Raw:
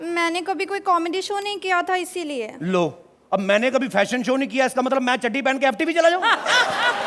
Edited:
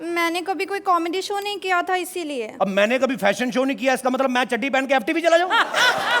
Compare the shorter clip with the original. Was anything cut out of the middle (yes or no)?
yes